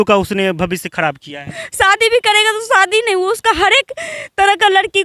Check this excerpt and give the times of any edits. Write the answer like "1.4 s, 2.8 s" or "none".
1.6 s